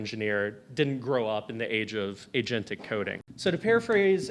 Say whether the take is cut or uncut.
cut